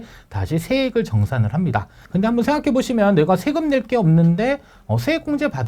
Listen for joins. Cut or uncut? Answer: cut